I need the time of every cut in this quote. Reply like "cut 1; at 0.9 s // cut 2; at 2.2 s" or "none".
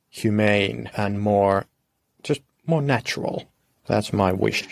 cut 1; at 0.9 s // cut 2; at 3.8 s